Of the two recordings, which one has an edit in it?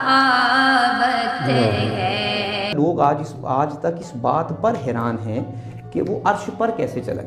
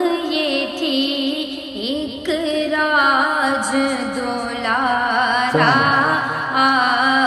first; 1 cut; at 2.7 s

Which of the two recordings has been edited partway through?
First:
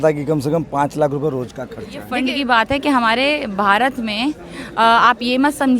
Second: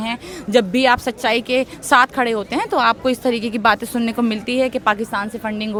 first; 1 cut; at 2.1 s

